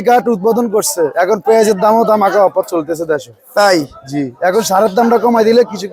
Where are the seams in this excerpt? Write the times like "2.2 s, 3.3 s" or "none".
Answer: none